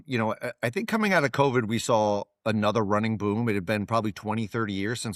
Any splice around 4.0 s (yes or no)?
no